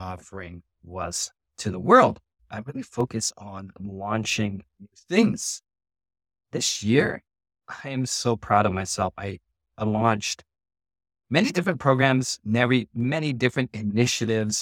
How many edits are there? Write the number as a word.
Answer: one